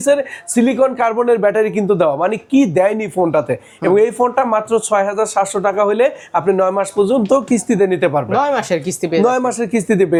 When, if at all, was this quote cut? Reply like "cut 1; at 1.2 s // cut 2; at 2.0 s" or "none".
none